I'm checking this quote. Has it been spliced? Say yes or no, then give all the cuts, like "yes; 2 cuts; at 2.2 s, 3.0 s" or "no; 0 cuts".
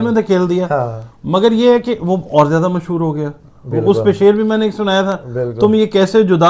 no; 0 cuts